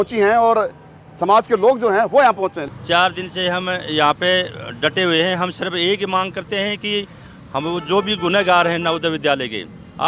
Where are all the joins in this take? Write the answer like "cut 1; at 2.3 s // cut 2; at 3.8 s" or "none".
cut 1; at 2.6 s